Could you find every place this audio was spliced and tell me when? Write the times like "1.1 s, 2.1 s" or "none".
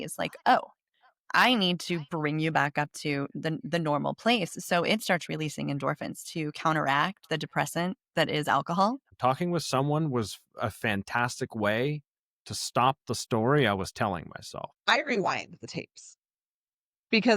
9.1 s, 14.7 s